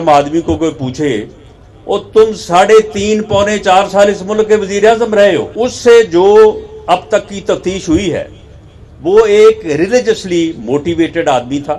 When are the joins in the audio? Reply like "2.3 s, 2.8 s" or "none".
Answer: 5.5 s